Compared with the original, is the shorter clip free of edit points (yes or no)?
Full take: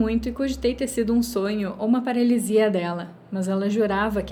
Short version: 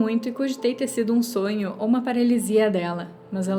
yes